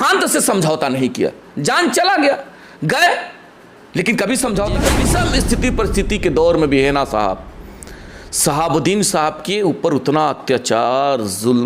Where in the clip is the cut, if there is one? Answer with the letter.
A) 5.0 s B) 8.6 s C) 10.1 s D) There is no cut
A